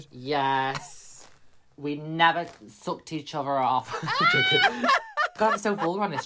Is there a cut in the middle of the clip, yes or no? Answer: yes